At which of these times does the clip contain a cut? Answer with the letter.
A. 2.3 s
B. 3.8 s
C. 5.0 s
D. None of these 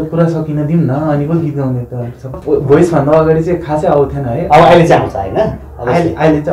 A